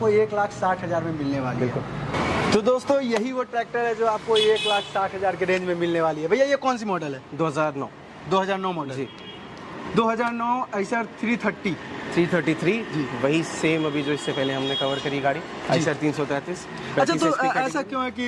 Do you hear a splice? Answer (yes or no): no